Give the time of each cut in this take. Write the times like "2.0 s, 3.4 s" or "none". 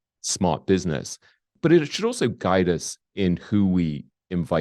1.5 s

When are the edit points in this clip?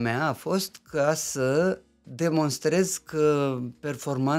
none

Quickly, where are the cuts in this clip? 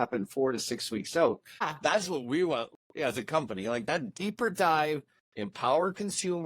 1.7 s, 4.1 s

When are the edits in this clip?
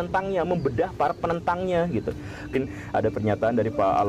2.5 s

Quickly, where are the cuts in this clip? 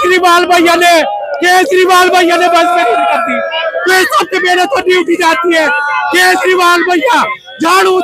none

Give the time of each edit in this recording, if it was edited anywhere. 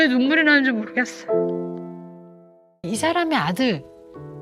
2.8 s

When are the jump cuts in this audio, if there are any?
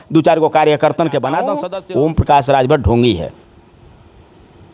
1.6 s

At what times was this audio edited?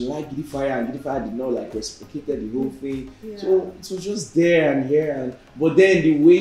none

